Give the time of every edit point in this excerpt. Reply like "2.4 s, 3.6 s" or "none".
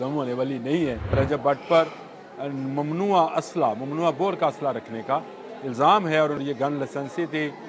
1.2 s, 6.4 s